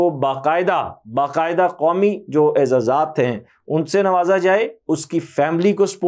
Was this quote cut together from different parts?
no; 0 cuts

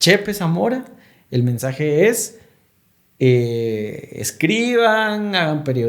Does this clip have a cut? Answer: no; 0 cuts

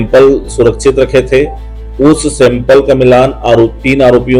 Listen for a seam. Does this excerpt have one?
no; 0 cuts

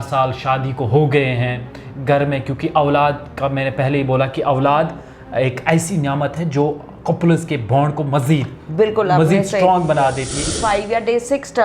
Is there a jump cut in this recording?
yes; 1 cut; at 10.6 s

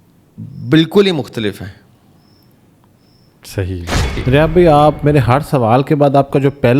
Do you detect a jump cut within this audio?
yes; 1 cut; at 4.2 s

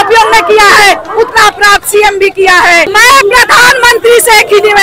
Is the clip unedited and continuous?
no; 1 cut; at 2.9 s

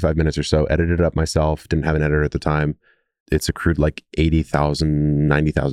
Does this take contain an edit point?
yes; 1 cut; at 3.1 s

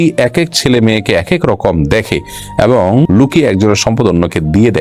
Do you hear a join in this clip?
no; 0 cuts

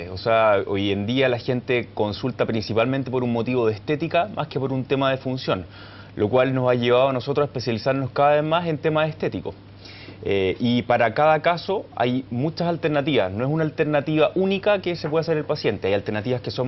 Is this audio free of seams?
yes; 0 cuts

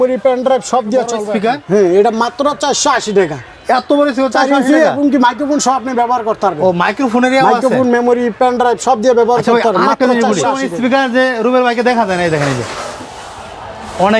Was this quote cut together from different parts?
yes; 2 cuts; at 1.2 s, 10.6 s

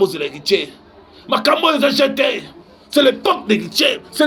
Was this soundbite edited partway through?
no; 0 cuts

